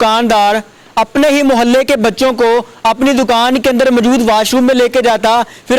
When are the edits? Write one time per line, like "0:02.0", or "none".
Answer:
none

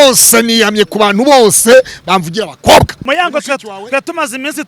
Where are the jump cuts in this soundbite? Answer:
0:03.0

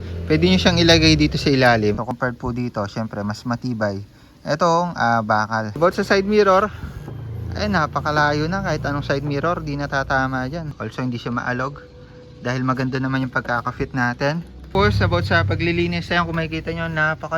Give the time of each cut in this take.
0:02.1
0:05.7
0:10.7
0:14.6

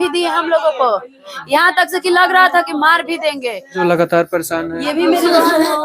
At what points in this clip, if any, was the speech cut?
0:03.8

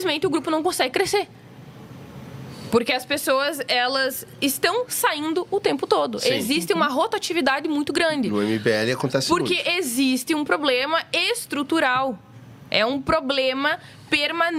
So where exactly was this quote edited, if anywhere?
none

